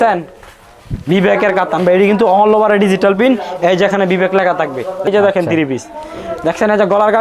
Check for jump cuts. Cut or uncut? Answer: cut